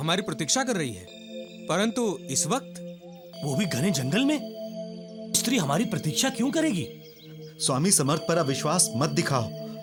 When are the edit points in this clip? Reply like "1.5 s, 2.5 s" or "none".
none

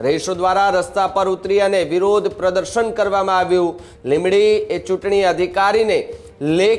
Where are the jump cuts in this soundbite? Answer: 3.9 s

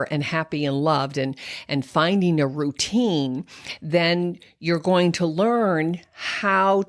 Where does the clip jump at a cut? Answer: none

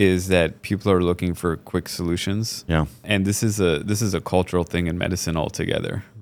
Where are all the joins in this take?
none

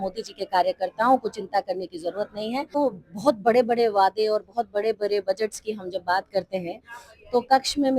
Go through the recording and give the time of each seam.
2.8 s

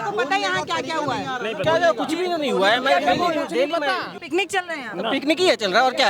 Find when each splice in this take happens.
4.1 s

